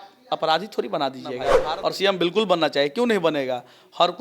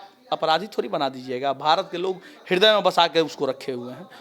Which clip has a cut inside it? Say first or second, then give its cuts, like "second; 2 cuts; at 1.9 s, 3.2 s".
first; 1 cut; at 1.5 s